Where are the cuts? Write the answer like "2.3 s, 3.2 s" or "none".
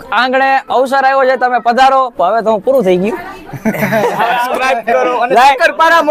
3.3 s, 4.5 s